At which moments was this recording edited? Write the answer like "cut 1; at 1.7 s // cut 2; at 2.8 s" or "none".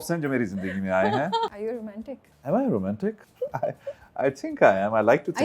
cut 1; at 1.5 s // cut 2; at 3.3 s